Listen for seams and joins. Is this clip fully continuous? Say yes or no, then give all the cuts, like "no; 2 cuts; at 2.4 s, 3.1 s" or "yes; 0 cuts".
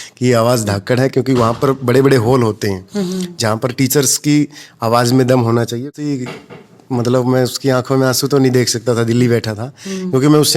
no; 1 cut; at 5.8 s